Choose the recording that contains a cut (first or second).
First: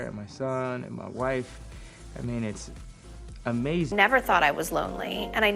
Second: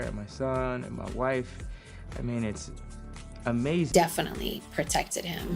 first